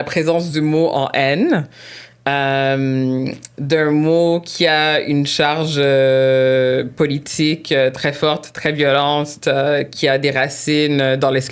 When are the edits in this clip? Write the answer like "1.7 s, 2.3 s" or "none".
none